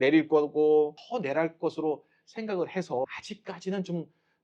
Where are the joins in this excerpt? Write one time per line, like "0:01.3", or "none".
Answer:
0:03.2